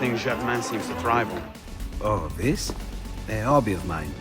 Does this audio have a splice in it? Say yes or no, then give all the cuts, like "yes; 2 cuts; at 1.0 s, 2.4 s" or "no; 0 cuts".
yes; 1 cut; at 1.6 s